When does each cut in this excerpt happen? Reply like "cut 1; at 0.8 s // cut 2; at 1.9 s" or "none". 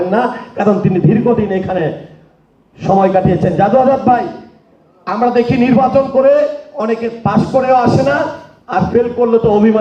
none